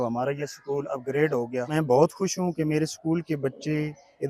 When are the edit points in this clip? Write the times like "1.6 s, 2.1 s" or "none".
1.7 s